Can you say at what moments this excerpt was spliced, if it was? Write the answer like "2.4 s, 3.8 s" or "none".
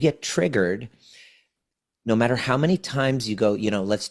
none